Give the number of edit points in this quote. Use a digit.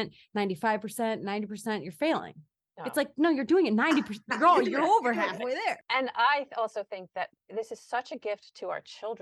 1